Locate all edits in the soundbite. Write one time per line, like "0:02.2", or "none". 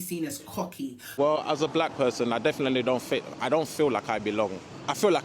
0:01.0